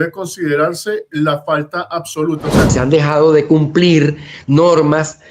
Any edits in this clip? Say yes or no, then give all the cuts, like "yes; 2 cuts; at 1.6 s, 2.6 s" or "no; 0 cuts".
yes; 1 cut; at 2.7 s